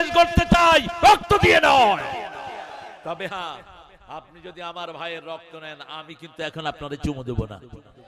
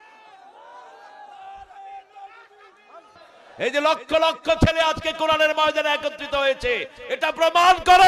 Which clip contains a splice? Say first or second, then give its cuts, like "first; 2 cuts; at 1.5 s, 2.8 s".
second; 1 cut; at 3.3 s